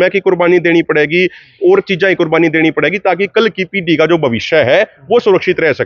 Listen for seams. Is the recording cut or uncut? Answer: uncut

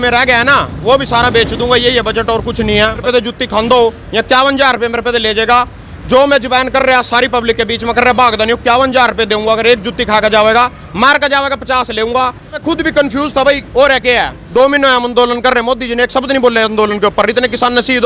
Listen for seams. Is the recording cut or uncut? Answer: cut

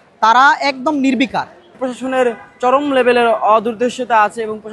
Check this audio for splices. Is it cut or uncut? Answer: cut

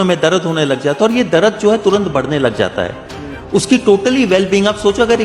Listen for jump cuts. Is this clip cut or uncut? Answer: uncut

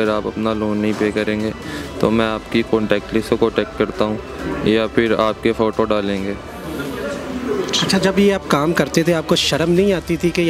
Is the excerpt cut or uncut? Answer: uncut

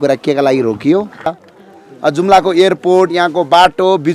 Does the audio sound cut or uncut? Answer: cut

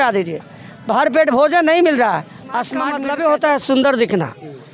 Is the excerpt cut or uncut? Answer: cut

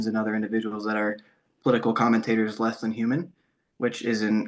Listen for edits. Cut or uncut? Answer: uncut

